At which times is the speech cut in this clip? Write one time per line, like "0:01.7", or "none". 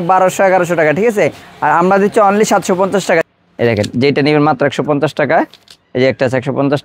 0:03.2